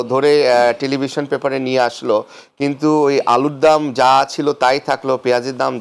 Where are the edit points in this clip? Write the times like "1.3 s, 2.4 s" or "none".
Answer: none